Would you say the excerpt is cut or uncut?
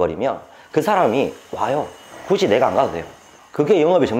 uncut